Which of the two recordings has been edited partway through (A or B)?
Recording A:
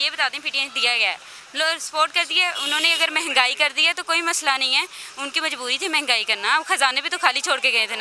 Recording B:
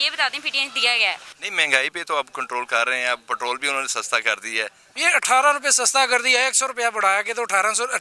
B